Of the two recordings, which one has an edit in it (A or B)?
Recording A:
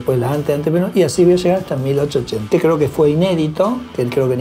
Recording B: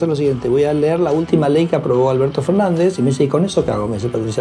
A